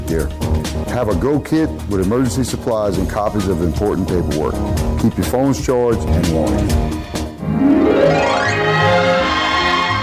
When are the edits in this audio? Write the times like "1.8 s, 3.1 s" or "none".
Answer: 7.3 s